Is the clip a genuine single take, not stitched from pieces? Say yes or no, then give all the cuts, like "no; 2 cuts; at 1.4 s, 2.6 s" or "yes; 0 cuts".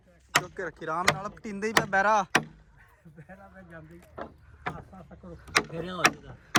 yes; 0 cuts